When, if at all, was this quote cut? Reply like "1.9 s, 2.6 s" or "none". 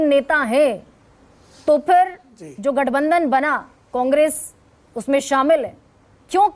none